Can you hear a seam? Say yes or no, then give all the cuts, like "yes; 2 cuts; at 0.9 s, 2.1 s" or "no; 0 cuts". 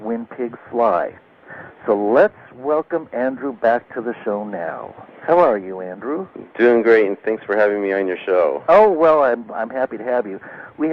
no; 0 cuts